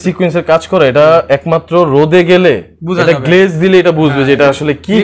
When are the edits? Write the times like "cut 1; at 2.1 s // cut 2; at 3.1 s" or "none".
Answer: none